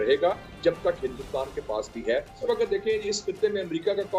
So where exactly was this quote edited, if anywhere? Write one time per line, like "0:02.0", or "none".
0:02.4